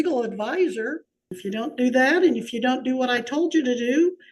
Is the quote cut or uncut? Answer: cut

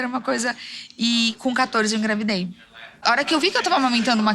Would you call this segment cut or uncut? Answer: cut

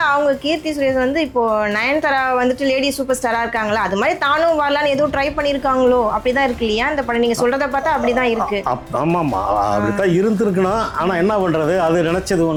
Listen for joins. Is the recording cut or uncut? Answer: uncut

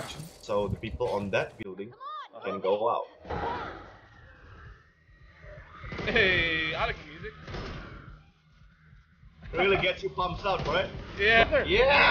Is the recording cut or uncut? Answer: cut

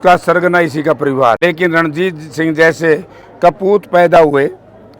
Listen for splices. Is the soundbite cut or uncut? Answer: cut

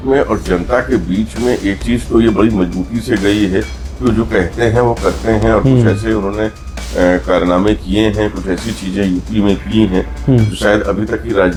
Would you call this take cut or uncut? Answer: uncut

